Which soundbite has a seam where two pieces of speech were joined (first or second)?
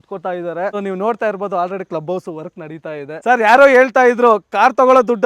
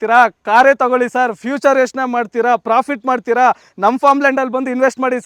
first